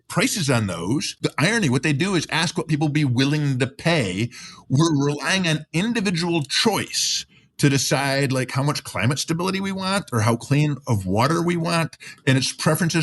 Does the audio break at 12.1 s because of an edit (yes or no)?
no